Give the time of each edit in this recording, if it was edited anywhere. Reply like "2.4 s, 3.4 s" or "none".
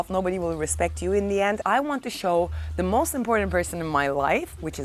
1.6 s